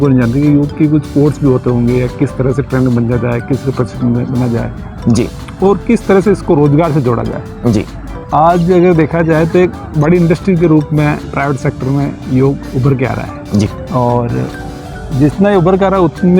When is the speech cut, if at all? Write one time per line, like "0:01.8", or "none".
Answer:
0:13.8